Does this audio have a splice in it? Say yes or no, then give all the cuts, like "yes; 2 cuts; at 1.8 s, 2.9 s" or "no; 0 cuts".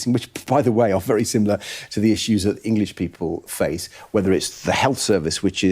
yes; 1 cut; at 3.5 s